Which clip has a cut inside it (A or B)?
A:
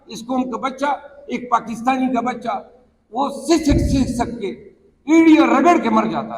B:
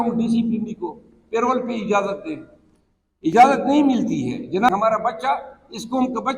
B